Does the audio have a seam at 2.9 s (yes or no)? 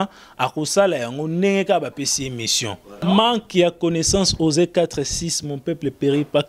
yes